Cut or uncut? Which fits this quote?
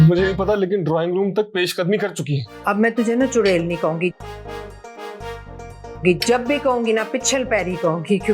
cut